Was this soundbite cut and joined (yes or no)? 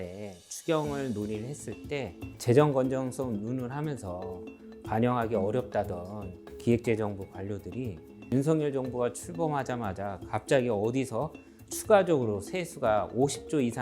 no